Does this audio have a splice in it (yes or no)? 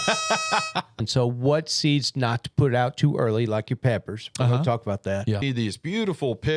yes